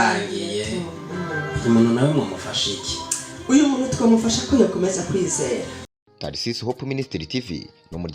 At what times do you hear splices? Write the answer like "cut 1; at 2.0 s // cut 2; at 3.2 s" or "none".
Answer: cut 1; at 5.8 s